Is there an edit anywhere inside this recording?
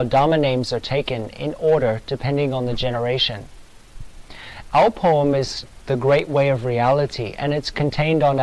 no; 0 cuts

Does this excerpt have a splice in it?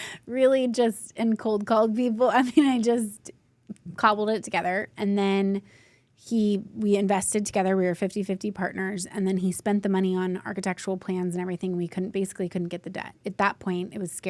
yes; 1 cut; at 13.2 s

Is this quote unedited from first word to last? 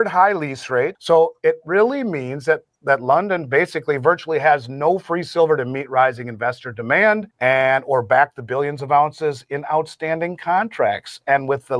no; 1 cut; at 1.0 s

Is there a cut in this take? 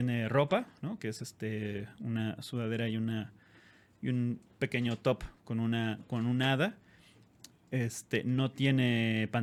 no; 0 cuts

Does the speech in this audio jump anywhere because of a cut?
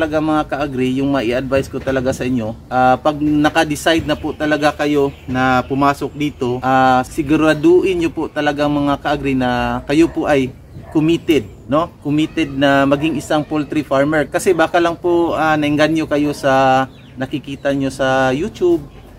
no; 0 cuts

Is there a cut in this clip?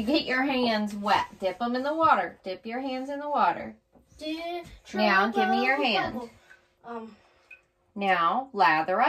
no; 0 cuts

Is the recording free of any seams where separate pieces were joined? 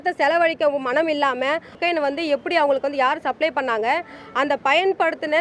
no; 1 cut; at 1.8 s

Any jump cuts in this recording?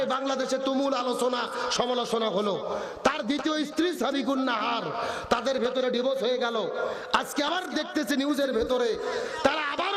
no; 0 cuts

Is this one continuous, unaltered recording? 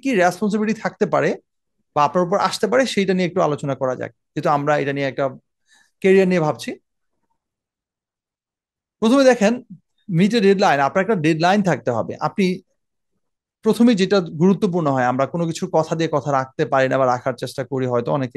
yes; 0 cuts

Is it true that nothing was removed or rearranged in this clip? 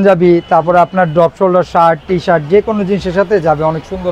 yes; 0 cuts

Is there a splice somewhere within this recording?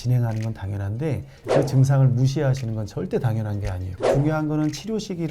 yes; 1 cut; at 3.9 s

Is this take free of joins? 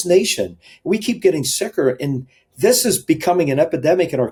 yes; 0 cuts

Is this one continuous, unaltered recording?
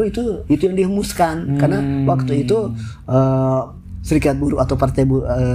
yes; 0 cuts

